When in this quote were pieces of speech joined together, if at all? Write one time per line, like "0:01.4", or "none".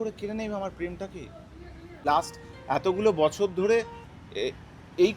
0:02.0